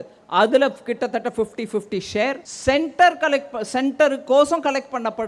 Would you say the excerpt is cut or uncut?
cut